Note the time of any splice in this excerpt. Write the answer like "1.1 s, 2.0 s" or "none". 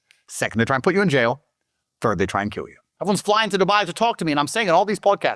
none